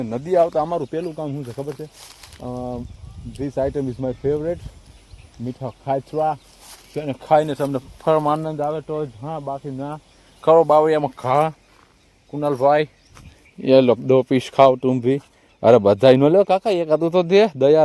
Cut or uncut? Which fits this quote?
uncut